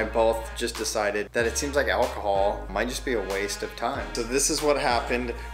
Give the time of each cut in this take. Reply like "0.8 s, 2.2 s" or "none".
1.3 s, 2.7 s, 4.1 s